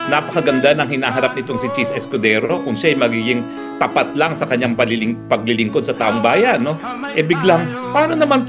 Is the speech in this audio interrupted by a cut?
no; 0 cuts

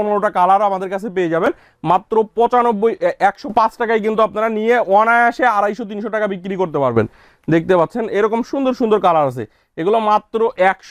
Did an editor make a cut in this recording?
no; 0 cuts

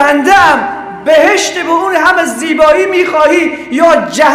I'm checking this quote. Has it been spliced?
no; 0 cuts

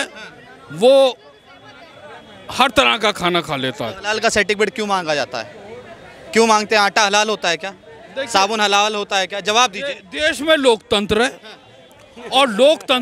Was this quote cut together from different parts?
no; 0 cuts

